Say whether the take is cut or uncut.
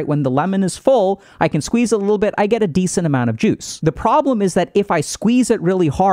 cut